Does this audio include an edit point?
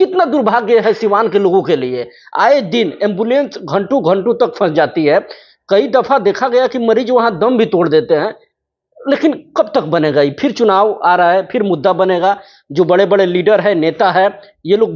no; 0 cuts

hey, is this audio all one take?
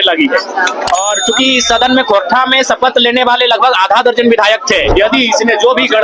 no; 1 cut; at 4.9 s

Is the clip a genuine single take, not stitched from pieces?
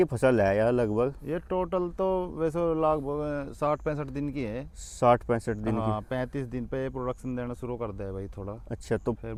yes; 0 cuts

